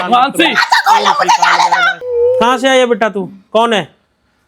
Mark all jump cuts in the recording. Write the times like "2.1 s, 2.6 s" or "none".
2.0 s